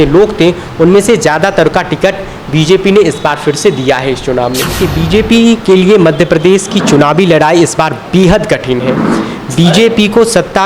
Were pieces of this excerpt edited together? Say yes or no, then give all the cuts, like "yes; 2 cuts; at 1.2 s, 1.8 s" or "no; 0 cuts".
yes; 1 cut; at 4.8 s